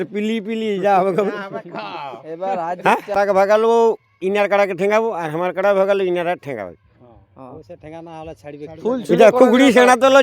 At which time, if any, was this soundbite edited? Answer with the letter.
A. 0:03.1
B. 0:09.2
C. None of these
A